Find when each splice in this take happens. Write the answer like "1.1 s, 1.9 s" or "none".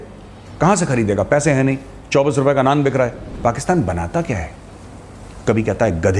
3.3 s